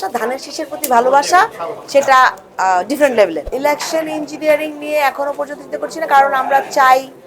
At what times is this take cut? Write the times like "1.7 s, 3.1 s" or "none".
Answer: 3.5 s

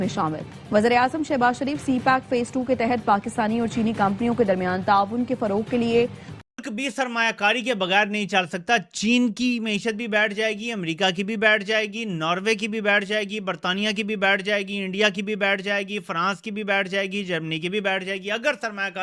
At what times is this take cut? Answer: 6.2 s

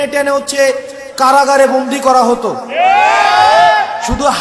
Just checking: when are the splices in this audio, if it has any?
none

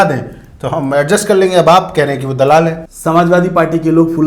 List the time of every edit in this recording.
2.8 s

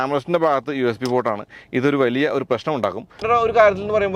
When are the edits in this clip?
3.2 s

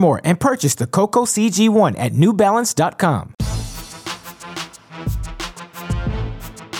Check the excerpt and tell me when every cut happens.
3.3 s

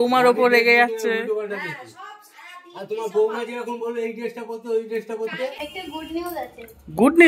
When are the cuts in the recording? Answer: 5.6 s

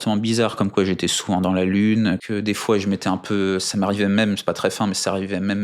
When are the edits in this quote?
2.2 s

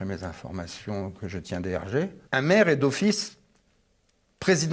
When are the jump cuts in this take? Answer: 2.2 s

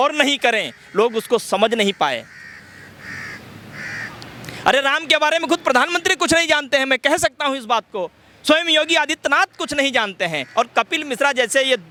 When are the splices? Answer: none

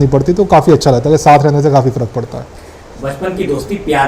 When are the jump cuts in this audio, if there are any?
none

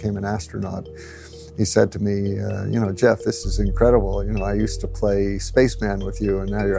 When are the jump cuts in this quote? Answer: 1.0 s

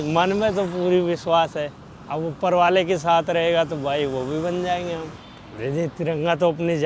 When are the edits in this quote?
5.3 s

